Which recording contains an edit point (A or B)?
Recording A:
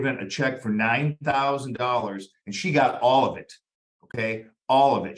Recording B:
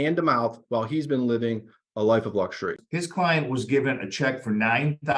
B